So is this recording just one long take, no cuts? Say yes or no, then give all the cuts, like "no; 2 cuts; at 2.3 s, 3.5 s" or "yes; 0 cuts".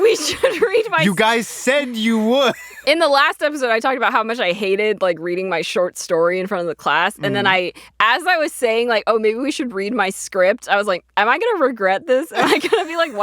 no; 1 cut; at 2.7 s